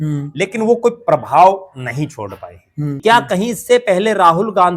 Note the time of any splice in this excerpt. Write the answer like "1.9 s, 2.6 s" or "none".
3.0 s